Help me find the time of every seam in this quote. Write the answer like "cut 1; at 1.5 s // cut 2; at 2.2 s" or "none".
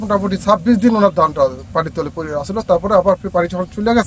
none

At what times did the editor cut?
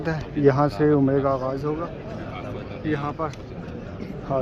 none

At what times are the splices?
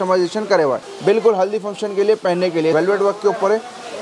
cut 1; at 0.9 s // cut 2; at 2.7 s

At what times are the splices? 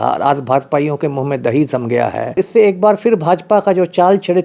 cut 1; at 2.4 s

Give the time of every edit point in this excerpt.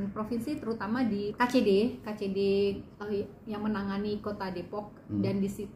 cut 1; at 1.3 s

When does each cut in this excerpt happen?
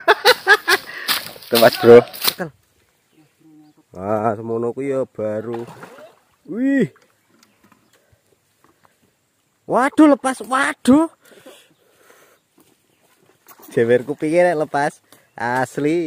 cut 1; at 2.3 s

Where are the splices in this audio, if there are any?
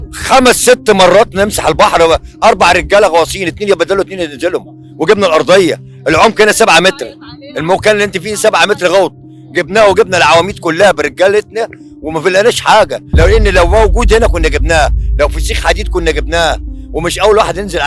cut 1; at 13.0 s

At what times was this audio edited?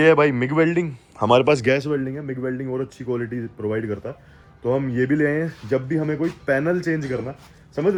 none

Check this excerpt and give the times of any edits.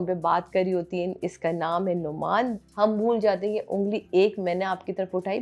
cut 1; at 2.6 s

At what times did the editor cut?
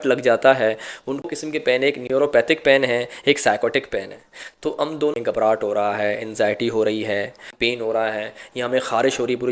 cut 1; at 1.7 s // cut 2; at 5.1 s // cut 3; at 7.5 s

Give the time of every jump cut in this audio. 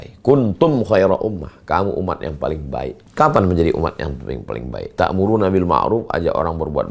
cut 1; at 3.0 s

